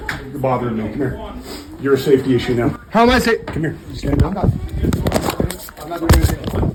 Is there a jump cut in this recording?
no; 0 cuts

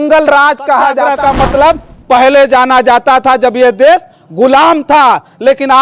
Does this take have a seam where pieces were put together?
yes; 1 cut; at 1.1 s

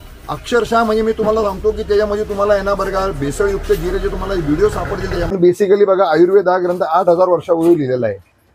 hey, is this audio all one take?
no; 1 cut; at 5.3 s

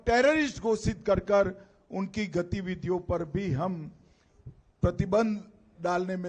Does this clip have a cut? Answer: no; 0 cuts

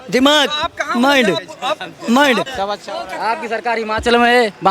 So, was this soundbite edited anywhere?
yes; 1 cut; at 2.5 s

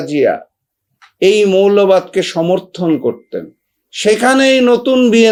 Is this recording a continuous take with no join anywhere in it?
yes; 0 cuts

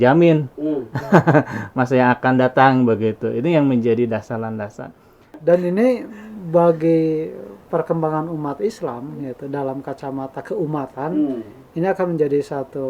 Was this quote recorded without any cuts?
no; 1 cut; at 5.3 s

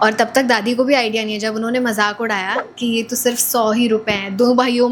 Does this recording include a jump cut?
no; 0 cuts

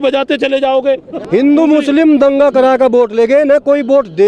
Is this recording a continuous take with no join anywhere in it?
no; 1 cut; at 1.2 s

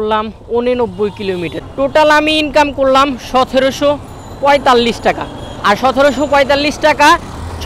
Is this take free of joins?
yes; 0 cuts

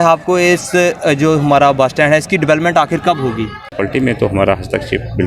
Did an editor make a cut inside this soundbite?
yes; 1 cut; at 3.7 s

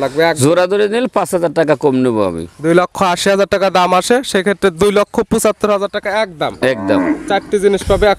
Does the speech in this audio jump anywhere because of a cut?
no; 0 cuts

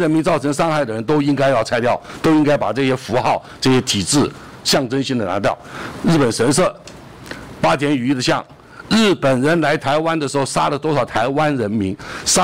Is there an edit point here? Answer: no; 0 cuts

